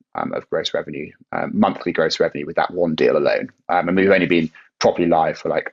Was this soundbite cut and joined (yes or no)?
no